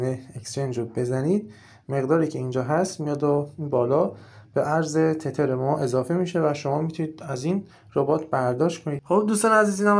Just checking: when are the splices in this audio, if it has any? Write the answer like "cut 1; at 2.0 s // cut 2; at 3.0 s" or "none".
cut 1; at 9.0 s